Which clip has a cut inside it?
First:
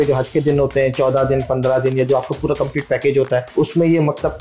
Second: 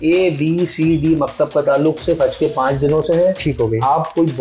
first; 1 cut; at 3.5 s

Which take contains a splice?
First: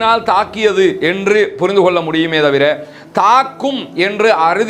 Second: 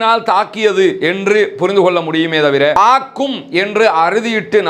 second; 1 cut; at 2.8 s

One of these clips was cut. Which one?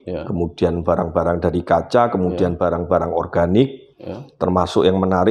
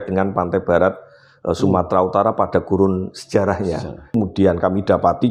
second; 1 cut; at 4.2 s

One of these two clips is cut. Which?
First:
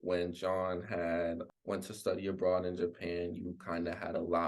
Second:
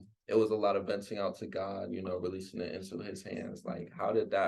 first; 1 cut; at 1.5 s

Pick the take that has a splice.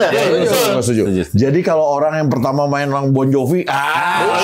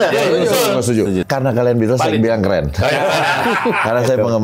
second; 1 cut; at 1.2 s

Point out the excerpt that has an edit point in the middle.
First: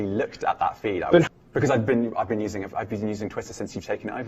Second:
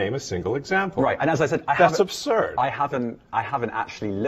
first; 1 cut; at 1.3 s

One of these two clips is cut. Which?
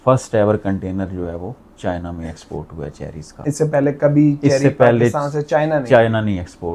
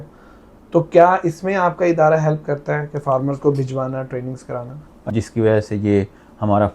second; 1 cut; at 4.9 s

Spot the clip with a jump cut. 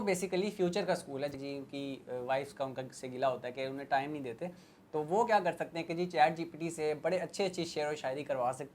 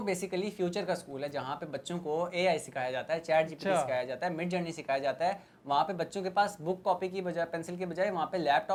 first; 1 cut; at 1.3 s

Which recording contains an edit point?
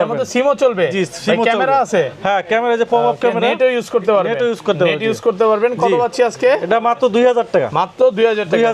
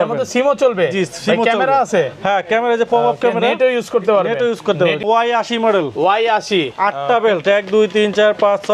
second; 1 cut; at 5.0 s

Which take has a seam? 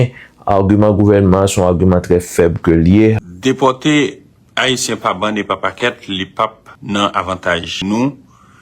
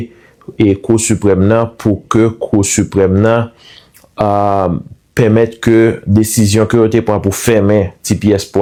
first; 3 cuts; at 3.2 s, 6.7 s, 7.7 s

